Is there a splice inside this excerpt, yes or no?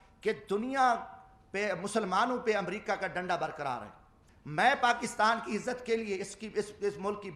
yes